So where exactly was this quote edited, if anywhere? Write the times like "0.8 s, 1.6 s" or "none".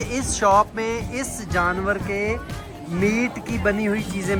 none